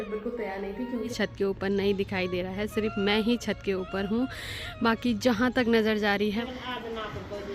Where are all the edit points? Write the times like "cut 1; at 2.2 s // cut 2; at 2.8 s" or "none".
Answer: cut 1; at 1.1 s // cut 2; at 6.4 s